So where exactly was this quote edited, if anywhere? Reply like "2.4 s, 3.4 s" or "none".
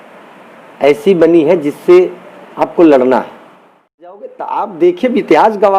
4.2 s